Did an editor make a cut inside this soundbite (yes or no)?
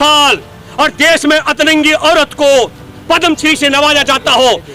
no